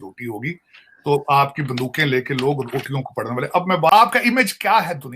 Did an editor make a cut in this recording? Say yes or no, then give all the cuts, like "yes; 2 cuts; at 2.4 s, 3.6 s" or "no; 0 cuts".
yes; 1 cut; at 3.9 s